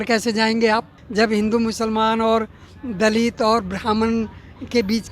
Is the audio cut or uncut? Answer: cut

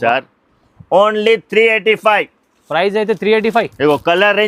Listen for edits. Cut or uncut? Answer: uncut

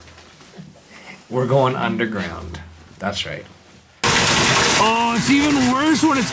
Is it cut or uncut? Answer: cut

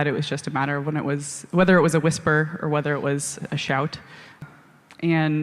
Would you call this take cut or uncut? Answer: cut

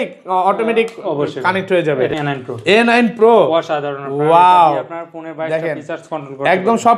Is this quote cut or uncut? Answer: cut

